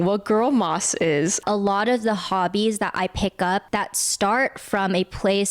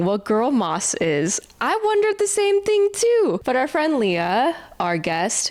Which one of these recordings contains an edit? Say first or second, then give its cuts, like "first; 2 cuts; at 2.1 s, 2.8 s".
first; 2 cuts; at 1.4 s, 3.7 s